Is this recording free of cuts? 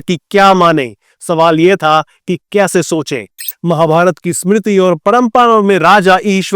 no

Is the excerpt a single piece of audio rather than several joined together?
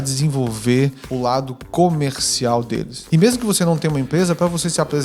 no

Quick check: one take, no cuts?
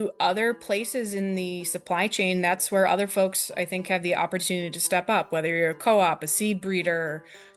yes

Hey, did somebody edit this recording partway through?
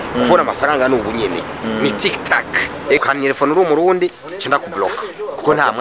yes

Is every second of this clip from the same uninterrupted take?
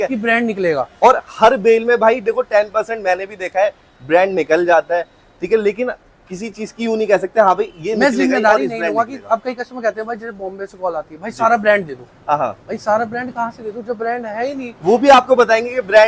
yes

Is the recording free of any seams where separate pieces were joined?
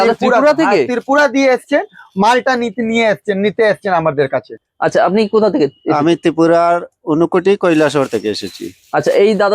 no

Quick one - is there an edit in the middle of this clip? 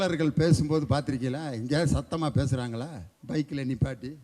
yes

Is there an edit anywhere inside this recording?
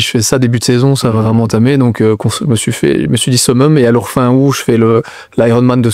no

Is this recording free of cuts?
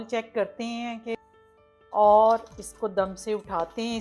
no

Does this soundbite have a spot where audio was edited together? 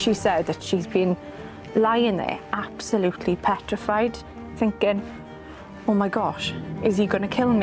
yes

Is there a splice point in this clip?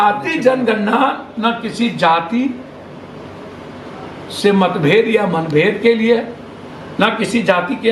no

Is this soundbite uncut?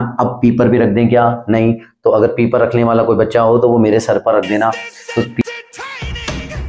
no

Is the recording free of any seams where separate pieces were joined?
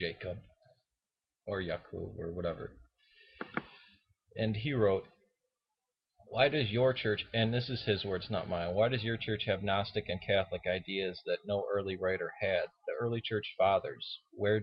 no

